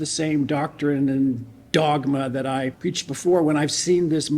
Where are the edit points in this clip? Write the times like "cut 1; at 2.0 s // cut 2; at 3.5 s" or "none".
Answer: cut 1; at 2.7 s